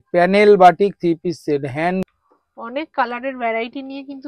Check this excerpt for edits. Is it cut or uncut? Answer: cut